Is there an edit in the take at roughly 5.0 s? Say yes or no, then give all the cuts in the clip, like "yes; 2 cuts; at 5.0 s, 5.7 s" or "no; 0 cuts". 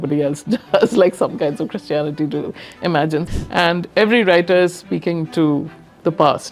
no; 1 cut; at 3.3 s